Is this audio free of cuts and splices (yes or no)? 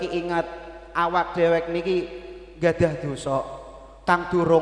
yes